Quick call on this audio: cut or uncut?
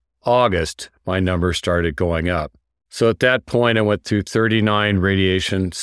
uncut